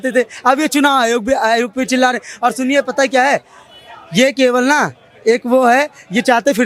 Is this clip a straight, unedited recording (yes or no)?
yes